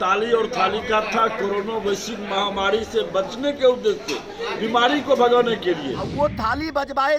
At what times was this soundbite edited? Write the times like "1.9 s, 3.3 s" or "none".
6.0 s